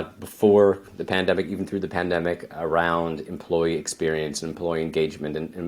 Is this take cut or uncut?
uncut